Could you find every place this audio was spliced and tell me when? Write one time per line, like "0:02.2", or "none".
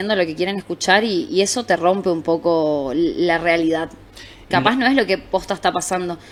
none